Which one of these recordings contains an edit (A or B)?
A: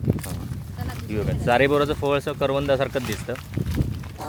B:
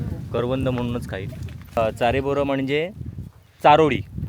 B